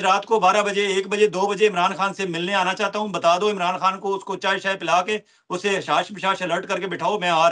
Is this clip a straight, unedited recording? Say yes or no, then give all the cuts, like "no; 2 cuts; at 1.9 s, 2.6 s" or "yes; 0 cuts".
yes; 0 cuts